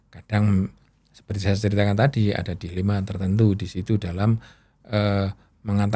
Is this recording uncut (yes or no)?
yes